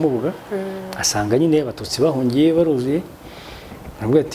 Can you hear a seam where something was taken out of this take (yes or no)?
no